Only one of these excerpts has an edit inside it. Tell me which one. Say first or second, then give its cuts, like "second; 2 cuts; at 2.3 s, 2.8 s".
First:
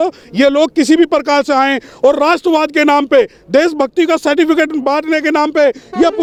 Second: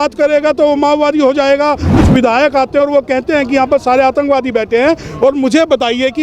second; 1 cut; at 2.0 s